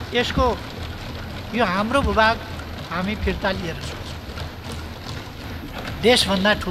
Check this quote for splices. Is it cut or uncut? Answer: cut